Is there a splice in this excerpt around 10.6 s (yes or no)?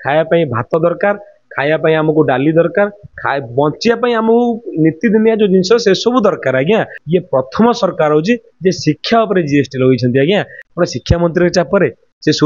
yes